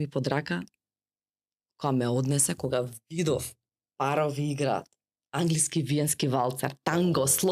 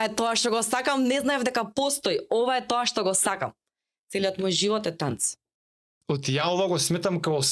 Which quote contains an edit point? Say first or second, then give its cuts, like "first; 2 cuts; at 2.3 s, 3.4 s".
second; 1 cut; at 5.9 s